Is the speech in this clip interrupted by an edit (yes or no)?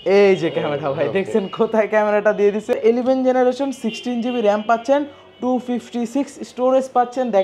yes